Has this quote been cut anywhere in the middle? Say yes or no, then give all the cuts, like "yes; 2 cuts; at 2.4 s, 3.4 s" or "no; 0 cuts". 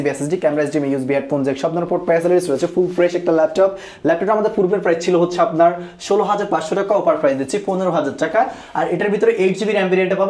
no; 0 cuts